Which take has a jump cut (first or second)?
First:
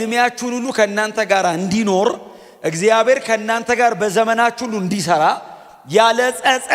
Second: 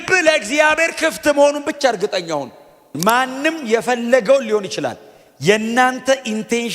second